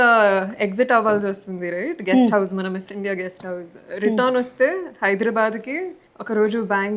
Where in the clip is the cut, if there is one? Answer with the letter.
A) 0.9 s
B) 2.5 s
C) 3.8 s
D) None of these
D